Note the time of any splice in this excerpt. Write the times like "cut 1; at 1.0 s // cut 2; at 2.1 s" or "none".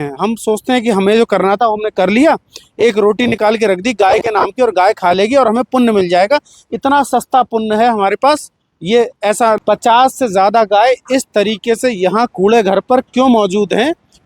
cut 1; at 9.6 s